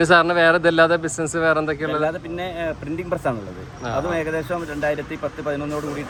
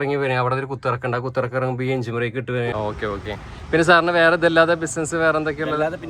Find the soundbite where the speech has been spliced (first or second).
second